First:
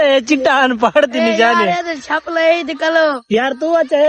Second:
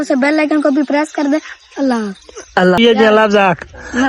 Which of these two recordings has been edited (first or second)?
second